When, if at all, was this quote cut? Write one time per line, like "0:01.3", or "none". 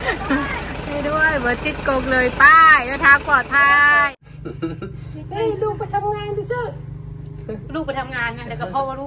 0:04.1